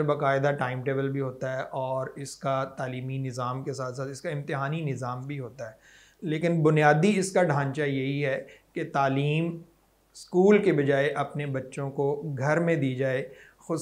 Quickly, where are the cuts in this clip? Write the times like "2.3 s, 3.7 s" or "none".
none

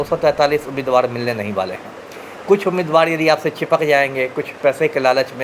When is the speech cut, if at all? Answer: none

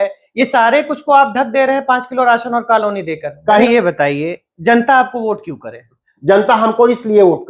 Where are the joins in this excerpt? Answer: 3.6 s

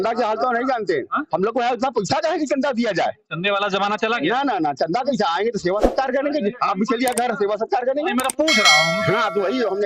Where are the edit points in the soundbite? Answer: none

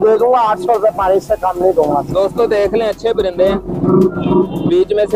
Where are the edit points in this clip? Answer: none

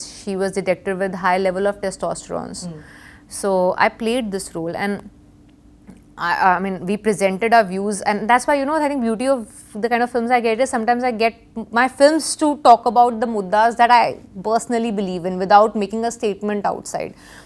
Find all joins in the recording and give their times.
none

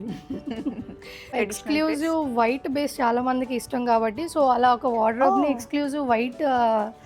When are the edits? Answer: 1.3 s

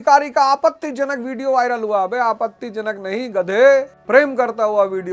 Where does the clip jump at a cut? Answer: 4.0 s

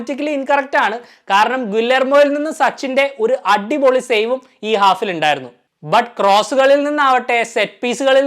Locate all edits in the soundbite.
none

